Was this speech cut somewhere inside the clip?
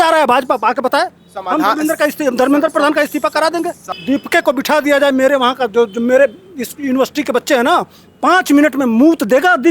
yes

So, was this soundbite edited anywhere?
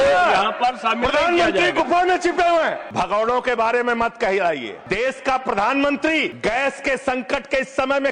yes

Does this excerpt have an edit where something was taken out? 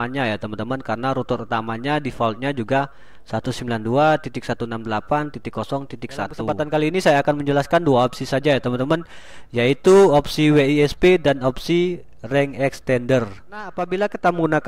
yes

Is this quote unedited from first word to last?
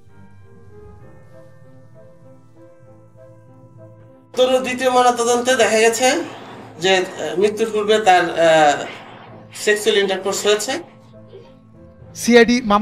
no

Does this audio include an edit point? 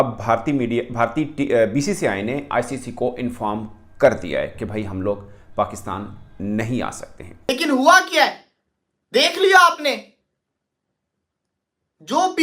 yes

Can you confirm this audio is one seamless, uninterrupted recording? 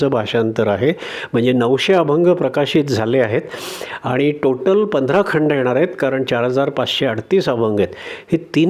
yes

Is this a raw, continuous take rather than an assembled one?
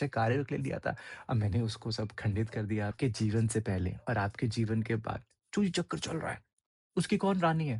no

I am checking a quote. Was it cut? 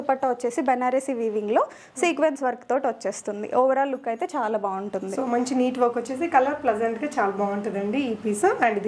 no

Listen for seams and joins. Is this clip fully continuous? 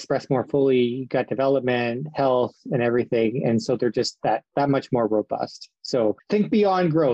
no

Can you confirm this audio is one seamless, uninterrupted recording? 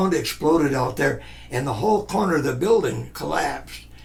yes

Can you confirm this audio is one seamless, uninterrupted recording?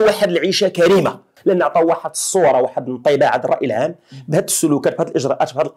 no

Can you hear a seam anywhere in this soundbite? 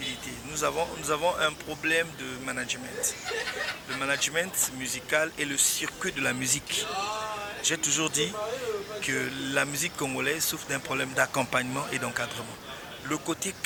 no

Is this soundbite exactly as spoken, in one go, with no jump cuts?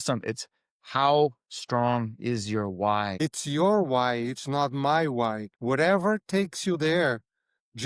no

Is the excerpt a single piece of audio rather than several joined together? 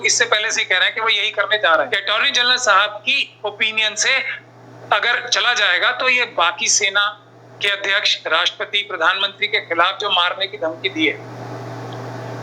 no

